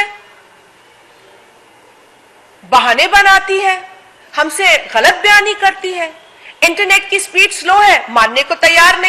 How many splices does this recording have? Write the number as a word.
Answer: zero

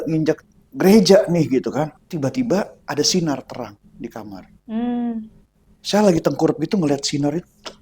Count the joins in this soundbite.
two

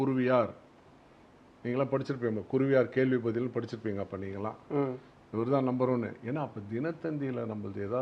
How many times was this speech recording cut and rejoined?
zero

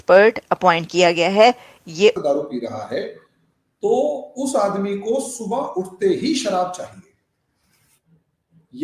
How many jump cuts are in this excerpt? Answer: one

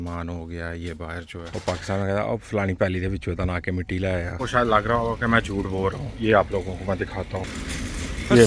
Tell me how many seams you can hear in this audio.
two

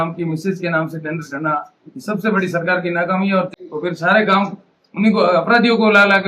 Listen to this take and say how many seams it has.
one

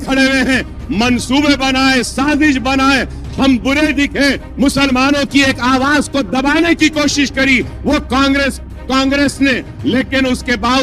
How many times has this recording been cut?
zero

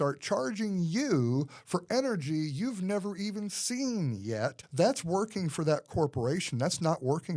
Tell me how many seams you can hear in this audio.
one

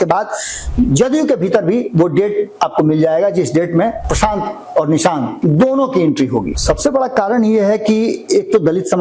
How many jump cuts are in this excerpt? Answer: three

